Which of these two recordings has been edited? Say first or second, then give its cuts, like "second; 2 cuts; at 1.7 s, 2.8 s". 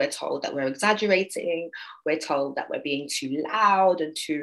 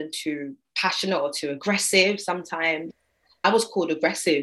second; 1 cut; at 3.4 s